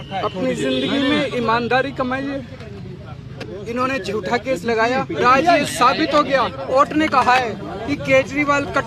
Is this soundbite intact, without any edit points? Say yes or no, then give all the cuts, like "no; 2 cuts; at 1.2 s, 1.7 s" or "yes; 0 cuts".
no; 4 cuts; at 3.4 s, 5.2 s, 6.7 s, 7.8 s